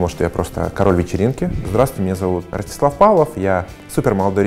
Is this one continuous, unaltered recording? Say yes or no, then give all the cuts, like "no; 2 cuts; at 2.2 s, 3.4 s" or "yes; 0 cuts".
no; 2 cuts; at 1.6 s, 2.5 s